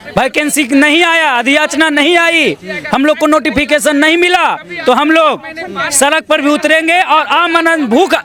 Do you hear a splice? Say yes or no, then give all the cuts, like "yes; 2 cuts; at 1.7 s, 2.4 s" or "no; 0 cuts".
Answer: no; 0 cuts